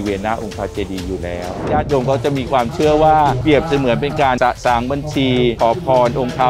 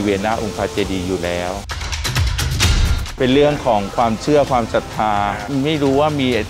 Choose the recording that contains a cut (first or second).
first